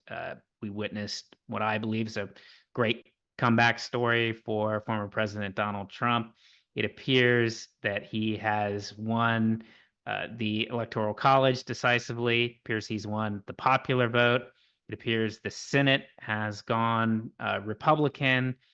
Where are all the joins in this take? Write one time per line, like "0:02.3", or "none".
none